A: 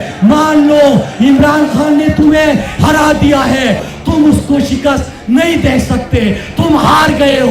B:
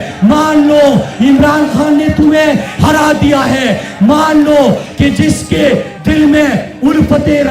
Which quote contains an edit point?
A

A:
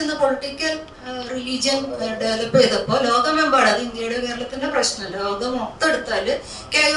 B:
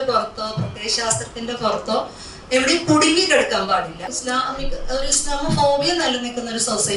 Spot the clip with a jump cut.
B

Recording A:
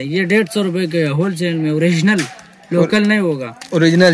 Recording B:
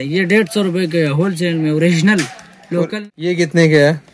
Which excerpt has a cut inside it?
B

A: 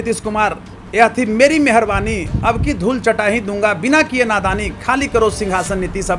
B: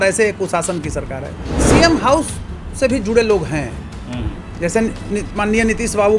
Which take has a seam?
B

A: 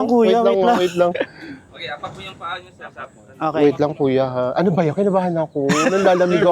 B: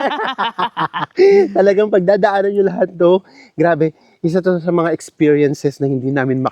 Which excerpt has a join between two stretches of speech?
A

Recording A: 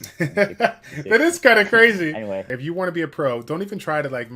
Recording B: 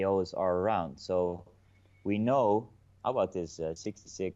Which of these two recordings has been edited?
A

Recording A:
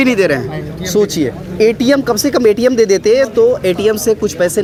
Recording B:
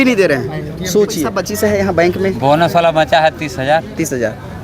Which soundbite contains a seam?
B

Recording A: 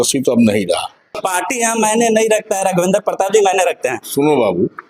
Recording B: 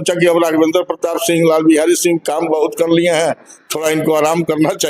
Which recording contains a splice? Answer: A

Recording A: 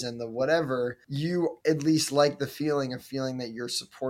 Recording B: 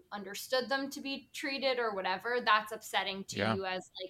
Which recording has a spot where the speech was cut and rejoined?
A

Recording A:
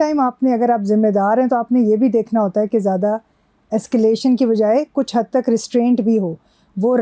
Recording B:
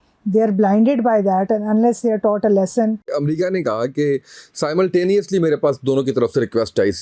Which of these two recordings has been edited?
B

